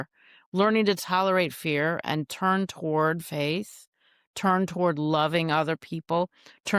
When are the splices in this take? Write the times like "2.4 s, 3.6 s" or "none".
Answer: none

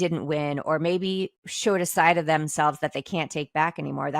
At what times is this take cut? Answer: 1.4 s

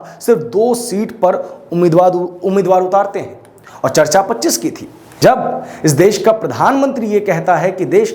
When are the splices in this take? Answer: 5.2 s

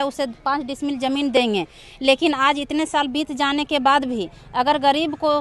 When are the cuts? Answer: none

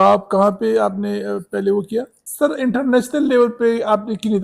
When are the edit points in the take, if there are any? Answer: 2.2 s

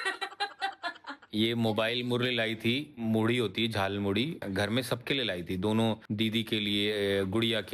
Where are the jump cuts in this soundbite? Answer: 1.1 s, 4.4 s

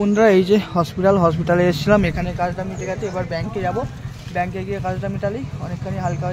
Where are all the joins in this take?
none

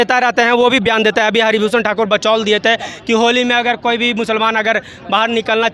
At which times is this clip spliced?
none

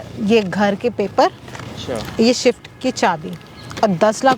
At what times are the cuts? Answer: none

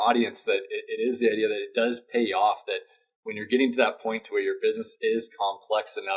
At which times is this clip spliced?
none

